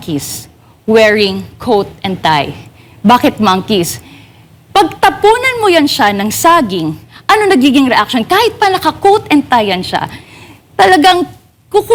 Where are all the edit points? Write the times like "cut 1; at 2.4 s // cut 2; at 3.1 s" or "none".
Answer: none